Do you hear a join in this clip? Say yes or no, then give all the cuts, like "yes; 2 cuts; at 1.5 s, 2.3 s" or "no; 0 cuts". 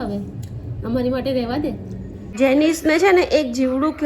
yes; 1 cut; at 2.3 s